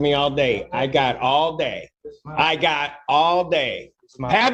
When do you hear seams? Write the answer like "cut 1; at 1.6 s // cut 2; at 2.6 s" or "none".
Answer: none